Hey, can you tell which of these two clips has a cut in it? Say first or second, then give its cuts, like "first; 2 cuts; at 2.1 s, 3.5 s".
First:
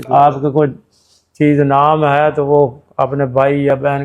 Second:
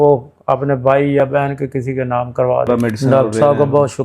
second; 1 cut; at 2.7 s